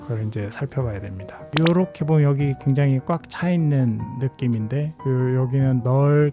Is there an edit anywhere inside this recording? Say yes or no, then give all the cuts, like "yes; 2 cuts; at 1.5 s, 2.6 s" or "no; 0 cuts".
yes; 1 cut; at 1.3 s